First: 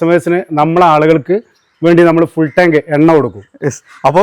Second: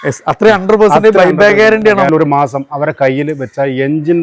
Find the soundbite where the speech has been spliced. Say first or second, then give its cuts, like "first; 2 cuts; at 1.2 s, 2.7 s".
second; 1 cut; at 2.1 s